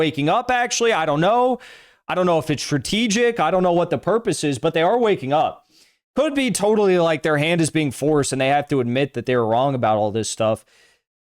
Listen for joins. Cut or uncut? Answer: uncut